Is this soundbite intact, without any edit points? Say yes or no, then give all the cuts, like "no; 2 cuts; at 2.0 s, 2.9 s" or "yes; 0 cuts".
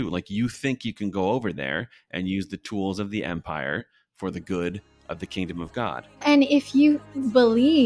no; 1 cut; at 6.2 s